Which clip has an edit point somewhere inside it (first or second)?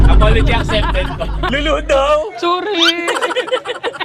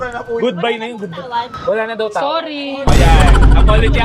first